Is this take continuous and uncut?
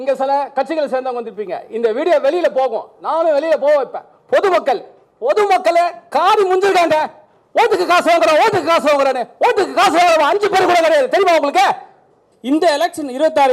no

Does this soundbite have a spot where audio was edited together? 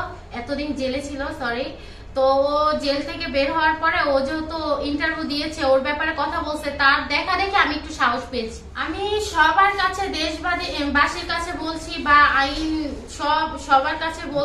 yes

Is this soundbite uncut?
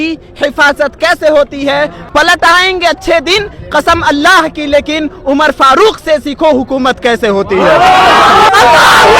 no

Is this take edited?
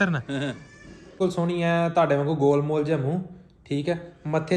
yes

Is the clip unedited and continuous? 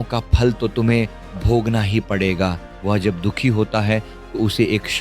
no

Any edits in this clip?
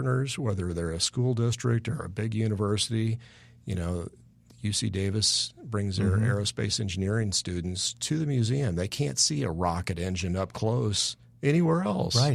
no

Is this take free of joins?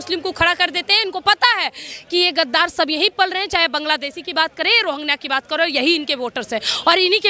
yes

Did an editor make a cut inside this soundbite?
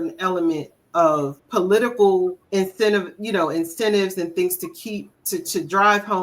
yes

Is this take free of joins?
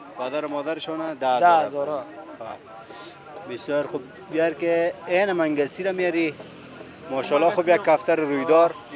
yes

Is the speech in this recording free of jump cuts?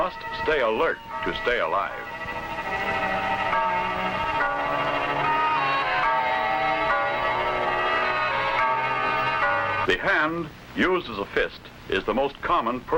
yes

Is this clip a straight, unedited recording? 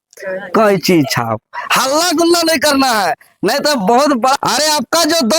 no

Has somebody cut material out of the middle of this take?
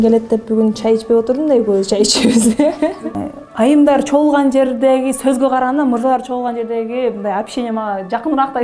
yes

